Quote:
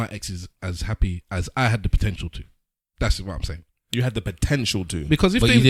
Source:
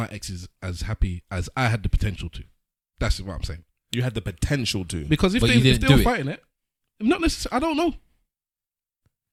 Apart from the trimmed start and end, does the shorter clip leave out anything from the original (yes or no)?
no